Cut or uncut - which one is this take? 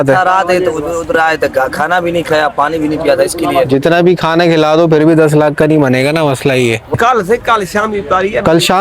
cut